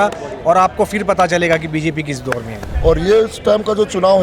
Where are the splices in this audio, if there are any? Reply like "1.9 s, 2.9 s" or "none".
2.6 s